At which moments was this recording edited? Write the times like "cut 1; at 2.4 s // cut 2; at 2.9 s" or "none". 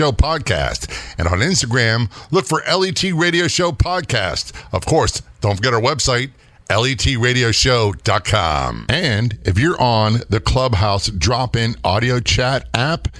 cut 1; at 8.8 s